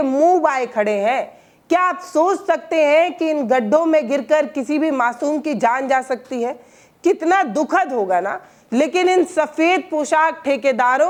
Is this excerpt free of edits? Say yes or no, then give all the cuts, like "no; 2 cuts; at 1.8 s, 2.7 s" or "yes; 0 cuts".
yes; 0 cuts